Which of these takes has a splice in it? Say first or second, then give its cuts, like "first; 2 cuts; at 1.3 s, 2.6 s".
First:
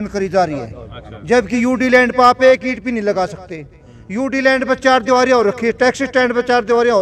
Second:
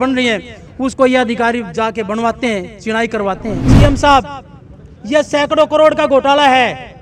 second; 1 cut; at 3.6 s